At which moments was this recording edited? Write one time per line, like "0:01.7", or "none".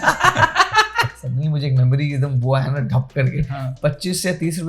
0:01.1
0:03.7